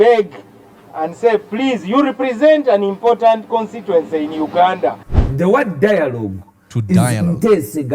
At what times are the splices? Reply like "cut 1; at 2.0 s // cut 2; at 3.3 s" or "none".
cut 1; at 5.1 s